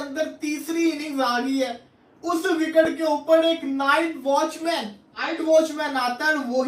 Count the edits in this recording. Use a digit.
1